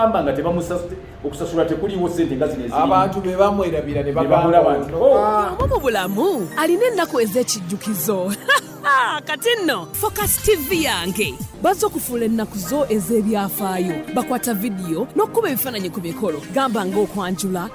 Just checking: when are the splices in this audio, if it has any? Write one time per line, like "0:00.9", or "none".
0:05.6